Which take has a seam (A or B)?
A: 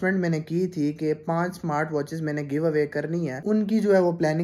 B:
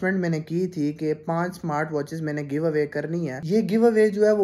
B